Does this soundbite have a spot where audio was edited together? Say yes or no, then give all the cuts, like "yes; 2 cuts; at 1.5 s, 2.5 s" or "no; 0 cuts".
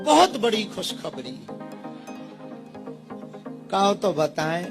yes; 1 cut; at 2.4 s